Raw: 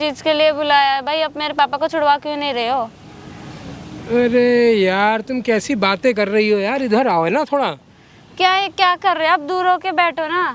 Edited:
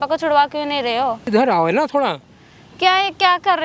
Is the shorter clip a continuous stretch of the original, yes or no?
no